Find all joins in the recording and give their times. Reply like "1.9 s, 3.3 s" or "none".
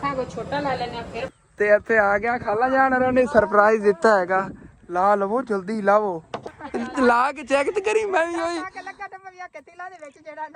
1.3 s, 6.3 s